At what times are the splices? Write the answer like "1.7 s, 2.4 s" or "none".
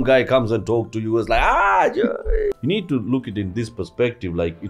2.6 s